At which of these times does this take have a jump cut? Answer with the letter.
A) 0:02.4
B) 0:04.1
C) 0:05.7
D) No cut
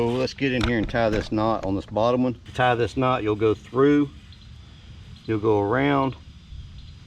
A